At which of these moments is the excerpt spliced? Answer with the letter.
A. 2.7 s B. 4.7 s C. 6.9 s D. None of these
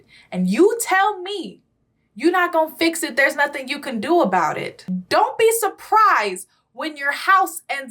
B